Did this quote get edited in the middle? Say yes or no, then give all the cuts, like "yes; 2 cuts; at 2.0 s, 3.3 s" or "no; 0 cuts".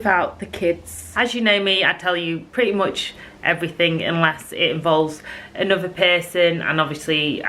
yes; 1 cut; at 1.0 s